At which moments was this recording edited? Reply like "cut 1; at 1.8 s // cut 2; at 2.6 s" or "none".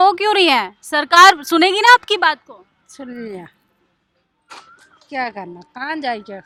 none